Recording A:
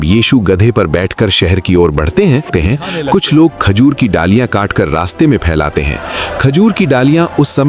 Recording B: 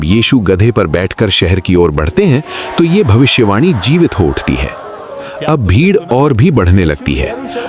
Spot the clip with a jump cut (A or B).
A